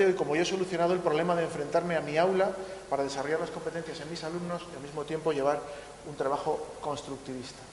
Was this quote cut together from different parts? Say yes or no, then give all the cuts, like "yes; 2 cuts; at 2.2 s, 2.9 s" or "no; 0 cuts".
yes; 1 cut; at 5.6 s